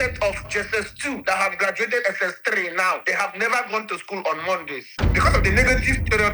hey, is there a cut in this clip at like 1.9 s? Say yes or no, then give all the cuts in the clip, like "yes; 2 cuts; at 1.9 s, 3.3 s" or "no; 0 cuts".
no; 1 cut; at 5.1 s